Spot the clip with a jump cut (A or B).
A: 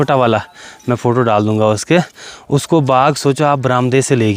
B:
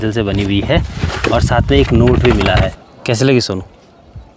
B